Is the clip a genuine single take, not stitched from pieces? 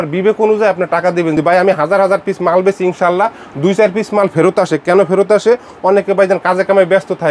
yes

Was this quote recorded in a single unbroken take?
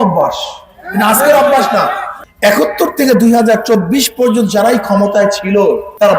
yes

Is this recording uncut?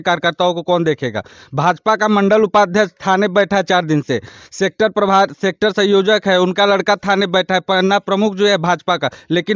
yes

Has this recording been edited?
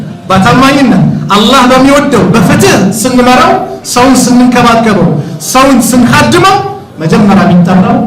no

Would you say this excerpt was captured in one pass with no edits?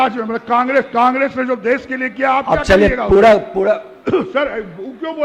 yes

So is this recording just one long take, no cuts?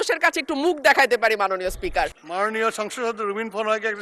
no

